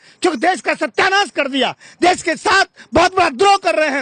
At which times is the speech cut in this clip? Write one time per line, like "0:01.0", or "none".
none